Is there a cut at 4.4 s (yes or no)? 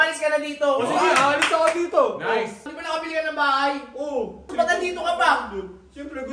yes